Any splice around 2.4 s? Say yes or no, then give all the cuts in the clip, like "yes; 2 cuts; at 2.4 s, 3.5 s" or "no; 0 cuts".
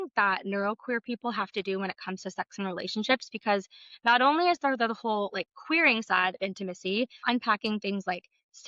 no; 1 cut; at 7.2 s